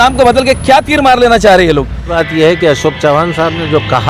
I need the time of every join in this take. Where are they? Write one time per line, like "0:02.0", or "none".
0:02.1

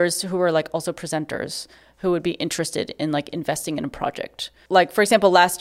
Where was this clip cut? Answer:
none

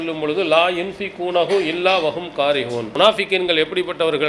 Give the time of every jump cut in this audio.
0:02.9

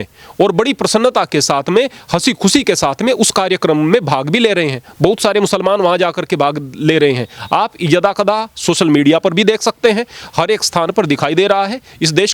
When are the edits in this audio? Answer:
none

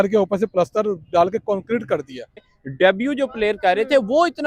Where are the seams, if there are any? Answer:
0:02.4

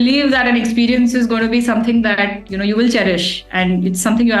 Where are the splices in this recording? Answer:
none

